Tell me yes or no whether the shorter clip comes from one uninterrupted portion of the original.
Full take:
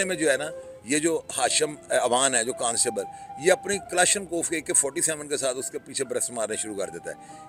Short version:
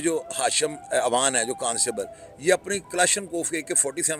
yes